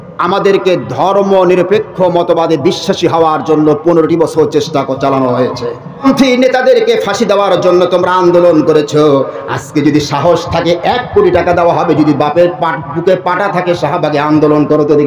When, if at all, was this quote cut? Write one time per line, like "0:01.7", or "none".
0:06.0